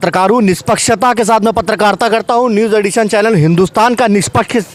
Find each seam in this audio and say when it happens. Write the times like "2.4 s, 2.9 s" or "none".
none

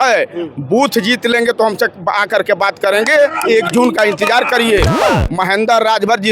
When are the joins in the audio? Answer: 5.0 s

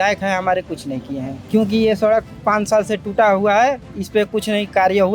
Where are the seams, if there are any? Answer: 1.3 s

